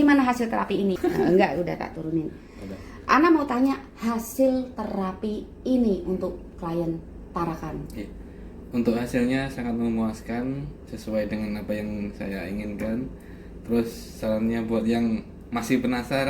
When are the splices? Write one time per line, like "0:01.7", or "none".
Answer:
0:01.0